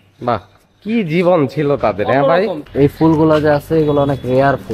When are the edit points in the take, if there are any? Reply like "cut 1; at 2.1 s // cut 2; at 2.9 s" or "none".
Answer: cut 1; at 2.6 s